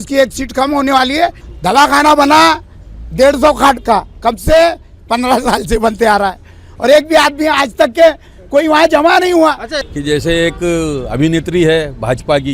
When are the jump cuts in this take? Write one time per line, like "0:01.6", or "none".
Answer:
0:01.5
0:09.7

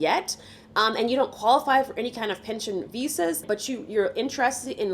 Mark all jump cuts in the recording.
0:03.4

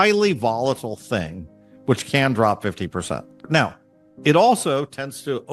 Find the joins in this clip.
0:03.3

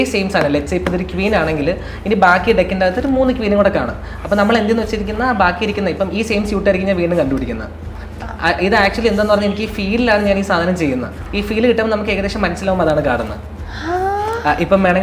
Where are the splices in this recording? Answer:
0:11.2

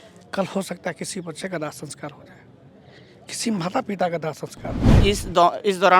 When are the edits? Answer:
0:04.8

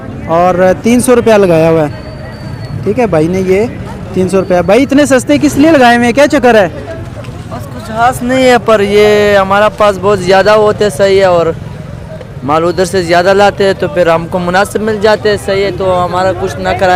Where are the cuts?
none

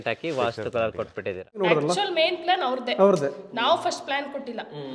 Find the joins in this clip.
0:01.6

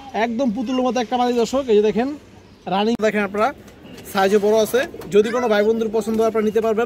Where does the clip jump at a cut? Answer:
0:03.0

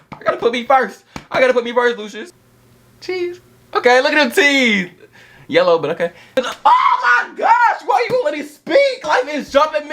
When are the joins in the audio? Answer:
0:02.2
0:06.3
0:09.0

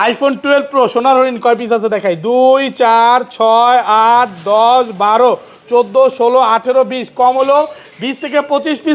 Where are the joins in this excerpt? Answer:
none

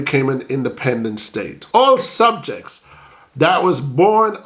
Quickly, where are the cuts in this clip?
0:01.6

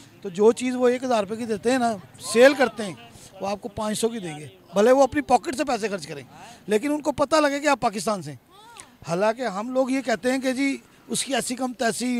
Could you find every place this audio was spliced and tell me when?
none

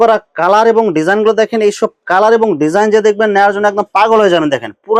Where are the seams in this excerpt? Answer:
none

